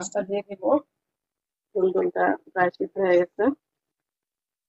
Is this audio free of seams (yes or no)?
yes